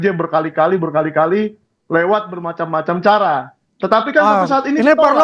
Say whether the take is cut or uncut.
uncut